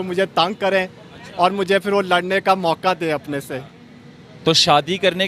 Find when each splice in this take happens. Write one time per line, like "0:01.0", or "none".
none